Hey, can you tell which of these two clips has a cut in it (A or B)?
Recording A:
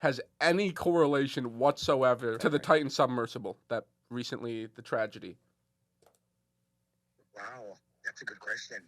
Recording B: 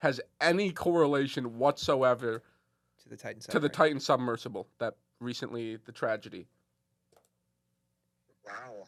A